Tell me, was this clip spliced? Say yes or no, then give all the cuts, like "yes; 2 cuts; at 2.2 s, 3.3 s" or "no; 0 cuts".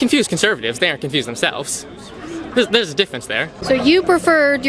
yes; 1 cut; at 3.6 s